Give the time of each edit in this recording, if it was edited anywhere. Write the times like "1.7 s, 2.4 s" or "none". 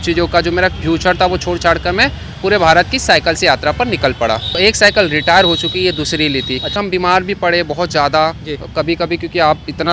4.5 s, 6.8 s